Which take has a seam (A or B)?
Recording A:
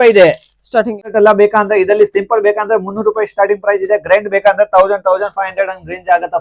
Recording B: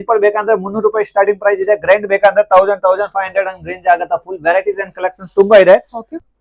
A